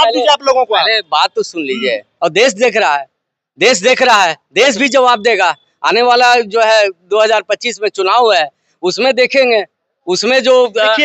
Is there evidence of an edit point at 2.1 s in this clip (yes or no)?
yes